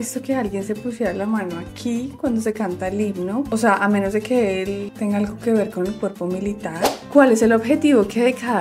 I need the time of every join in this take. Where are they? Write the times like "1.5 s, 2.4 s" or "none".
6.8 s